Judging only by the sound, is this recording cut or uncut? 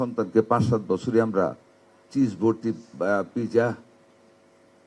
uncut